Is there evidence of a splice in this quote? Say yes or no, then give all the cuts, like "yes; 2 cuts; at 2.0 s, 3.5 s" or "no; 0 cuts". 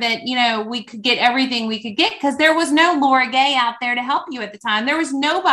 no; 0 cuts